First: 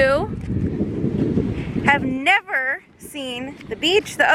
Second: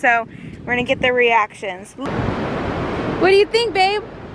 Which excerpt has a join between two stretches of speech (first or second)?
second